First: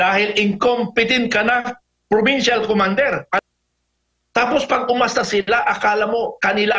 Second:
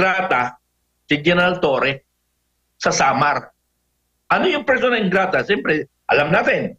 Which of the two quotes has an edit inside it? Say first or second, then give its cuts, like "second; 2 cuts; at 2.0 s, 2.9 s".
first; 1 cut; at 3.4 s